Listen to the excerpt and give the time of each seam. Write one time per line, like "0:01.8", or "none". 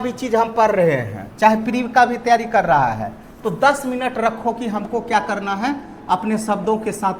none